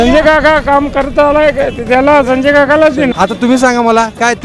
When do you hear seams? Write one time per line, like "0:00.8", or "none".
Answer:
0:03.1